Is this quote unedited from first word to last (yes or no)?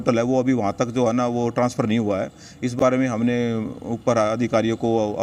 yes